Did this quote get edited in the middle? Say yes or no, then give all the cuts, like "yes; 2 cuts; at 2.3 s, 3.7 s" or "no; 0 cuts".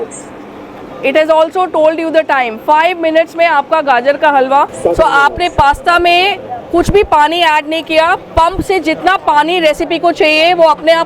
yes; 1 cut; at 4.7 s